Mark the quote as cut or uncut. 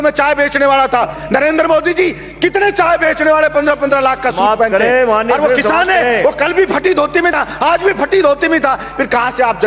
cut